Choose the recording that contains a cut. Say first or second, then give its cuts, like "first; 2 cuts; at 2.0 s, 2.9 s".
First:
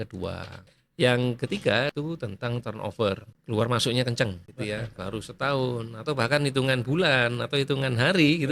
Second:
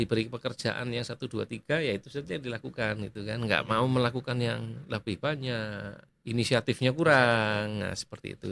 first; 3 cuts; at 1.9 s, 3.3 s, 4.5 s